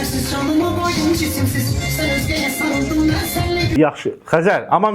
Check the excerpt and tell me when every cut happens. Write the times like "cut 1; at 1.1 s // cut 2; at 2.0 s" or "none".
cut 1; at 3.7 s